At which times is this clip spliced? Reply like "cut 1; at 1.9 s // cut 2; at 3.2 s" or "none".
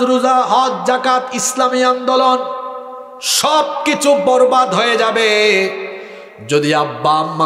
none